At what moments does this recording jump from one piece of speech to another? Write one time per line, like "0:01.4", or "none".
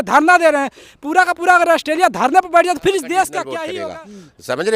0:03.7

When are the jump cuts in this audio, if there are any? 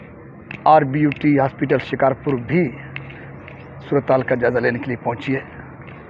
none

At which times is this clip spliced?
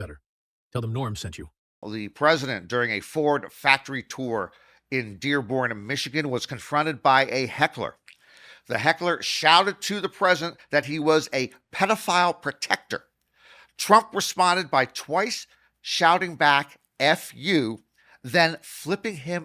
0:02.0

